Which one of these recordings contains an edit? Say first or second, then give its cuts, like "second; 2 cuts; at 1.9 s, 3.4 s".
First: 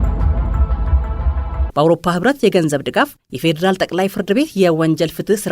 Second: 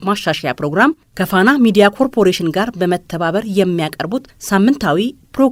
first; 1 cut; at 1.0 s